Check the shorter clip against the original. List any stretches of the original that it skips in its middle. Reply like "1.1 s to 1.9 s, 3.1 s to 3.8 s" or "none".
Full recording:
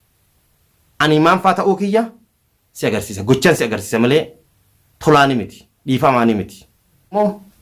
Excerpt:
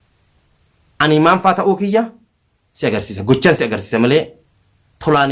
none